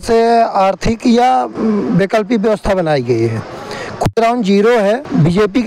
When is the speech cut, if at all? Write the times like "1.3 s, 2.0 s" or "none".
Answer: none